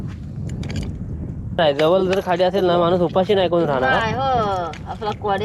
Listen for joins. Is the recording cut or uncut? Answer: cut